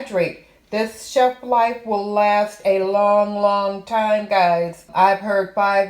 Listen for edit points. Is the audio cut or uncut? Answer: cut